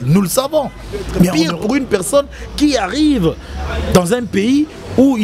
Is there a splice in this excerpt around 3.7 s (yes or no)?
no